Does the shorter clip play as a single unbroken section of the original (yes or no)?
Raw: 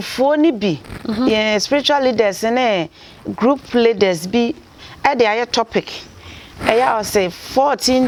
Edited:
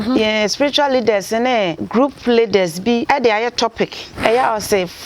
no